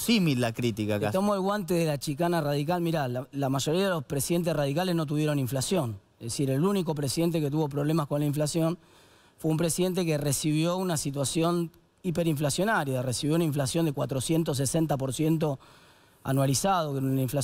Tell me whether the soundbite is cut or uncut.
uncut